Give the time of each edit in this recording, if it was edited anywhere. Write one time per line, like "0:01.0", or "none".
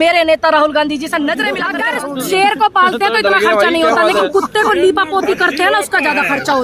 0:01.7